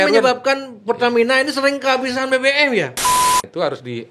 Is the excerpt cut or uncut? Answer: cut